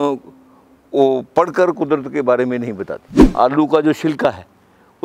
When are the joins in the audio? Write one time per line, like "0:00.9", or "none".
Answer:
0:03.3